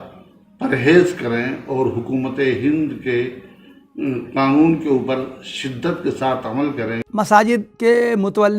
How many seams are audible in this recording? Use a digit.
2